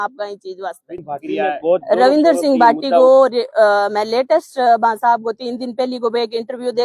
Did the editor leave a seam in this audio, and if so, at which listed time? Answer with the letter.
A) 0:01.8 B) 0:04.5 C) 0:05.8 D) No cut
A